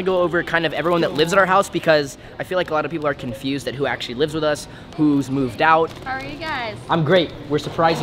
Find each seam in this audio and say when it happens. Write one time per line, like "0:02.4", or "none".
0:06.0